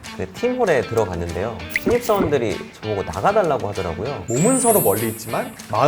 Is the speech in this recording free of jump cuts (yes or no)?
no